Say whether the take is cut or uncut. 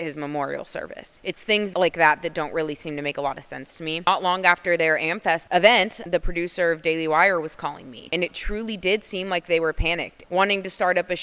cut